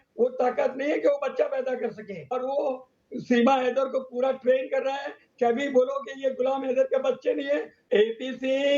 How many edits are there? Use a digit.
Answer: 2